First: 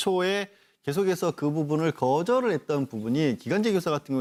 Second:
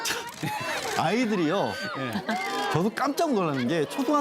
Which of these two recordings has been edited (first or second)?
second